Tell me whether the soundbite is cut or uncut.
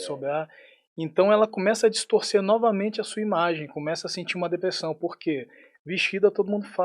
uncut